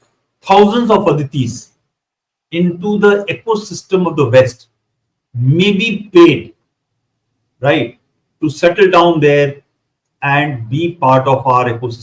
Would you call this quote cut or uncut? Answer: uncut